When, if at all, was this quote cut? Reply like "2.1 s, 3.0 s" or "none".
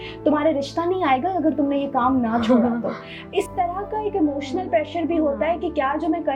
none